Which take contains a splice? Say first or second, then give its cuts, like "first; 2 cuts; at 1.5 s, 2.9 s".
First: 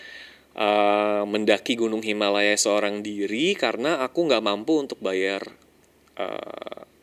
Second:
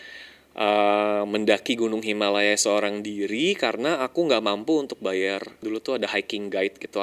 second; 1 cut; at 5.5 s